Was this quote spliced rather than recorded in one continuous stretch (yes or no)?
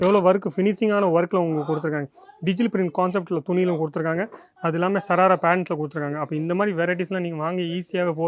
no